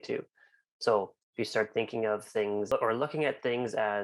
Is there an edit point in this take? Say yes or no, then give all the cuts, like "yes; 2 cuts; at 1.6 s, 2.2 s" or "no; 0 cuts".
yes; 2 cuts; at 1.2 s, 2.7 s